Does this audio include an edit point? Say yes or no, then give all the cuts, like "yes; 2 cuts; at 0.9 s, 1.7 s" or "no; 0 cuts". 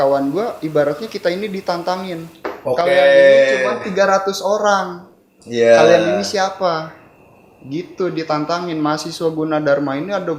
no; 0 cuts